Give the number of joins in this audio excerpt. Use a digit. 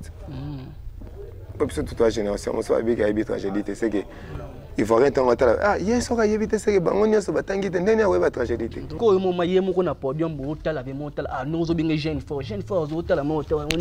1